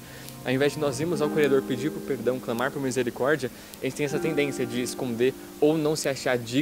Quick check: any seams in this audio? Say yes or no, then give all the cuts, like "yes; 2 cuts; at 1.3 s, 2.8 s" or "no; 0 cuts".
no; 0 cuts